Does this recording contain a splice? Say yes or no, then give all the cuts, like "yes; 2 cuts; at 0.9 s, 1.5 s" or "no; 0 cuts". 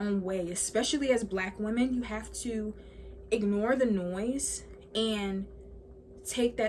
no; 0 cuts